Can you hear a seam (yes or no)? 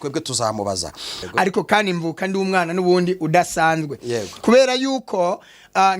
yes